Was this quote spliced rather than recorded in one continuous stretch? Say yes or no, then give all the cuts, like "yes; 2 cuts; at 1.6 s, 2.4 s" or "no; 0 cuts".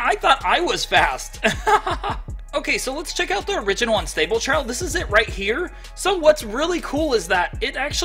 yes; 1 cut; at 2.3 s